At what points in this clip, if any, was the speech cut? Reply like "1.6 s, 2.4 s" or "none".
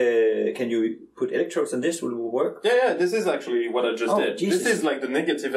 none